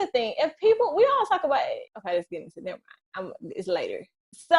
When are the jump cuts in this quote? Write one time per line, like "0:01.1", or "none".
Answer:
0:01.9